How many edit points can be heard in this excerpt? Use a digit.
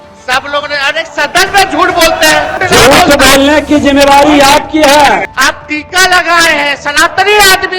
2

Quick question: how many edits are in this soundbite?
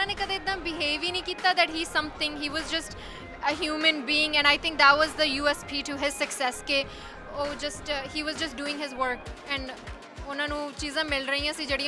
0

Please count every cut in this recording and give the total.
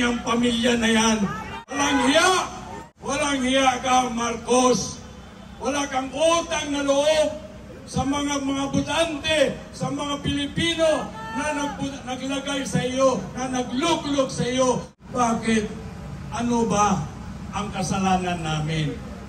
3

